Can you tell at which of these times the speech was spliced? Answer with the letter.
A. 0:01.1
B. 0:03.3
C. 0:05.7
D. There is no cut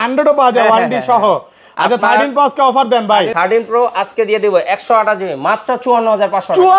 B